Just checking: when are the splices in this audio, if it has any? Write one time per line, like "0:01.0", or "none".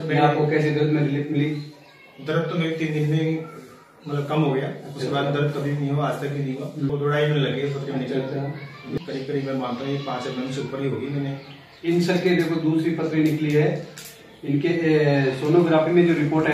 0:06.9
0:09.0